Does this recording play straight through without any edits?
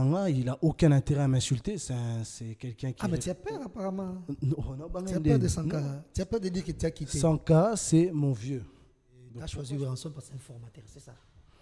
no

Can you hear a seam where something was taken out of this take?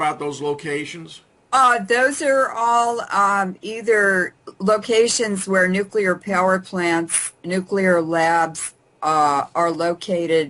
no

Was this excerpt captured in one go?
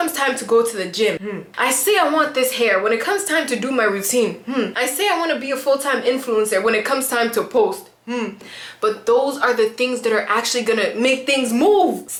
yes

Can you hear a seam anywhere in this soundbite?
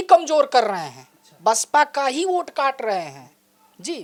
no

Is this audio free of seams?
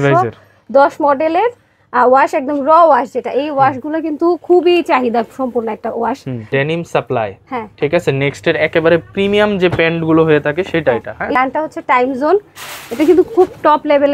no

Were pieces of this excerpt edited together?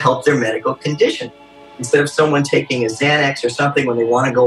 yes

